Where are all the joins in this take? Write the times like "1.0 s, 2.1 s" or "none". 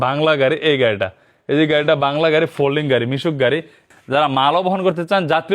3.8 s